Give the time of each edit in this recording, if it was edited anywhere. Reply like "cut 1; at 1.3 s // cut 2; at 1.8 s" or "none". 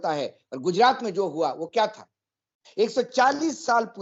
none